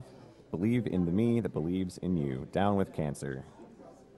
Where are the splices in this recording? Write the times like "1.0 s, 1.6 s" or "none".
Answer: none